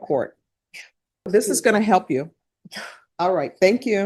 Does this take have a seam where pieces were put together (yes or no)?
yes